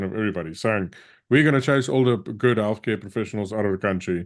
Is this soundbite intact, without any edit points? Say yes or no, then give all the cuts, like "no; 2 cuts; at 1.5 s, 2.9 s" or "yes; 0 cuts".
yes; 0 cuts